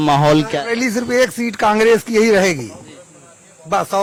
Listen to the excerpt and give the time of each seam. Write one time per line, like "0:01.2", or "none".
none